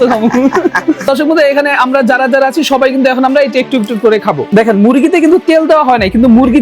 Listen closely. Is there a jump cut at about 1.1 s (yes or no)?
yes